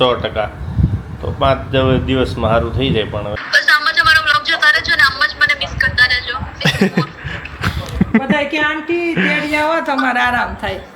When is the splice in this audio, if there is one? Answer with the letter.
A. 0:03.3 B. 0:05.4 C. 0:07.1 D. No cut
A